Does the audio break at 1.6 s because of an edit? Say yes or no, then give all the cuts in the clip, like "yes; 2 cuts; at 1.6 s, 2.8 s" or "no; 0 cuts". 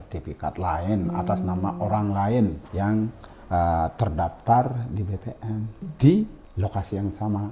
no; 3 cuts; at 2.9 s, 5.8 s, 6.4 s